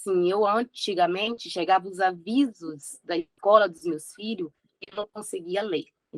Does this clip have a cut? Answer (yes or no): no